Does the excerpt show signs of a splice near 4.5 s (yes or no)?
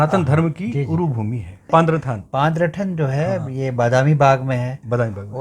no